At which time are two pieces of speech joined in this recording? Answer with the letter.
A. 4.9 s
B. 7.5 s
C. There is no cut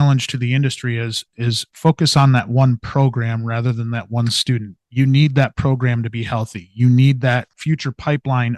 B